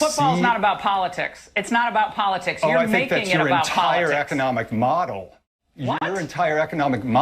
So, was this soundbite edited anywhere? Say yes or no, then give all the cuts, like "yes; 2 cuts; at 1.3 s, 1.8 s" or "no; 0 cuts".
yes; 1 cut; at 6.0 s